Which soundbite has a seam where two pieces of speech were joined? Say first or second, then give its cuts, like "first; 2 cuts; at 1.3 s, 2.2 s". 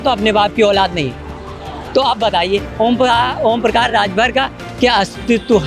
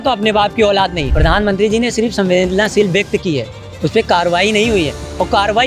second; 1 cut; at 1.1 s